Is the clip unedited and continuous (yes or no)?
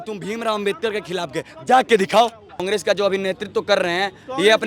no